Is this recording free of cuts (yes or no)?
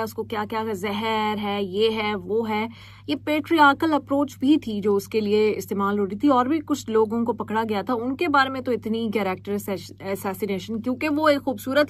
yes